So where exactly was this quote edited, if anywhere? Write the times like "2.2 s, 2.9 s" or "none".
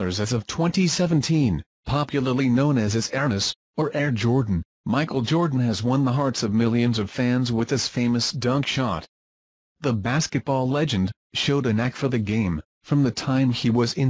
none